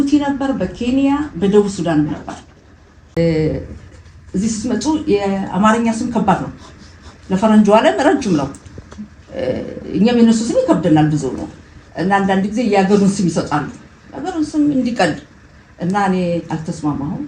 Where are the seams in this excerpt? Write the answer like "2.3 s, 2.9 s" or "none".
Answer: 3.2 s